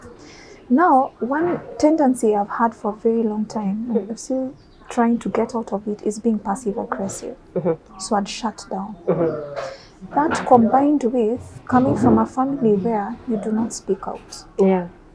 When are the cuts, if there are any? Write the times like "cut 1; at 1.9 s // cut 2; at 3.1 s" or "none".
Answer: none